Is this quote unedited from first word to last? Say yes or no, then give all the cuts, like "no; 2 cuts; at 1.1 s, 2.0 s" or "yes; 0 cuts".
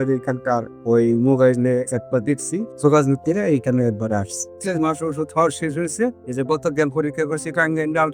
no; 2 cuts; at 2.7 s, 4.5 s